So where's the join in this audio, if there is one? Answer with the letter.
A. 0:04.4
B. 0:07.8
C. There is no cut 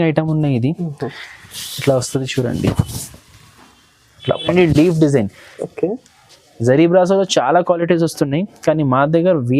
A